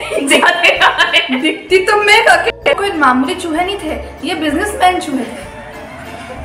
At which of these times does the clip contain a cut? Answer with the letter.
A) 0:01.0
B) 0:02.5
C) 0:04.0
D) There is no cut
B